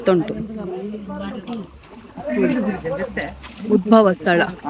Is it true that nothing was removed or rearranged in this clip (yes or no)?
yes